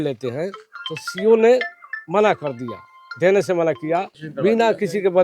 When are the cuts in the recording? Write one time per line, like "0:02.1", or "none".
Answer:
0:04.2